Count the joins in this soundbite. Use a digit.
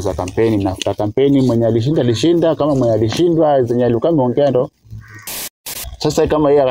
1